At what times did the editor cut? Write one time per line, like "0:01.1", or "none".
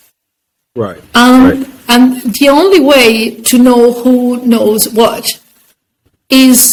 none